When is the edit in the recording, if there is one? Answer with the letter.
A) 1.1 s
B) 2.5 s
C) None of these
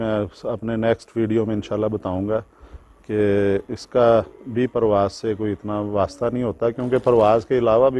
C